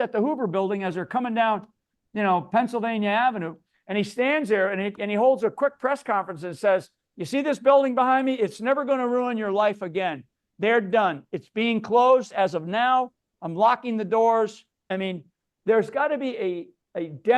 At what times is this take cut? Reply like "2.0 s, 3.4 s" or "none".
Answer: 14.9 s